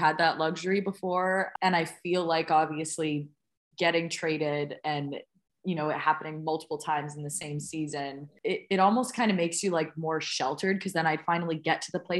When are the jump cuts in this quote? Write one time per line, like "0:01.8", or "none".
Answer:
0:01.5
0:08.3